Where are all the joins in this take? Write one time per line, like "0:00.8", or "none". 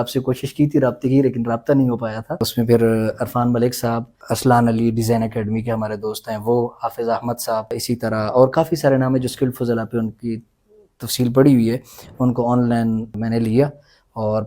0:02.5
0:04.2
0:07.7
0:13.1